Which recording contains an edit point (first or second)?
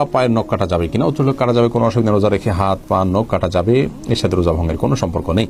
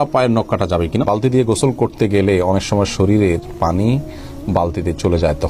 second